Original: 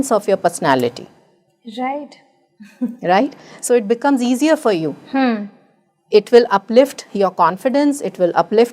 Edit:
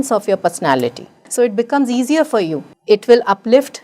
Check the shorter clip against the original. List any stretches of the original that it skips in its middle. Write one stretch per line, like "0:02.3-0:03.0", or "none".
0:01.1-0:03.5
0:05.0-0:05.9